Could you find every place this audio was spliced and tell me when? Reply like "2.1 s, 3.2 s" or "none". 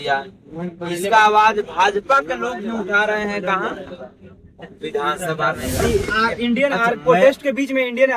5.8 s